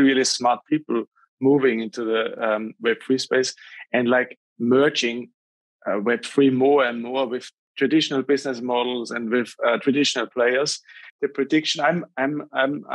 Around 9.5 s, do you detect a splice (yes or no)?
no